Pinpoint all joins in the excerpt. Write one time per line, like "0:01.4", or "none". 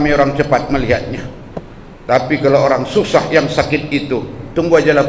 none